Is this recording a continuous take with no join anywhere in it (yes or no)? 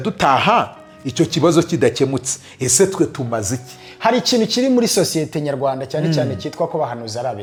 yes